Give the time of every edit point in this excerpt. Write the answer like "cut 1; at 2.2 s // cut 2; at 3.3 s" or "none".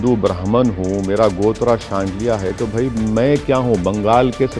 none